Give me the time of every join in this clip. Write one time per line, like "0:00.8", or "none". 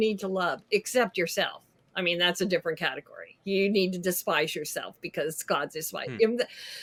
none